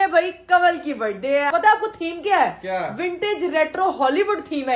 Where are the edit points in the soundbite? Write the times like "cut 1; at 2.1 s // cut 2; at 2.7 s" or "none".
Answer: cut 1; at 1.5 s